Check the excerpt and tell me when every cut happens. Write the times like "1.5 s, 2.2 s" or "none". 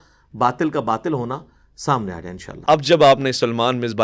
2.5 s